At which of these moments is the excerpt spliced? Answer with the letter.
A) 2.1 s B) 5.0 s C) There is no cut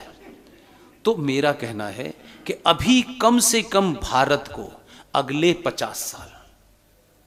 C